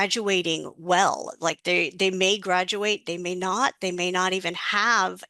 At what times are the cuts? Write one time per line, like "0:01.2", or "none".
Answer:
none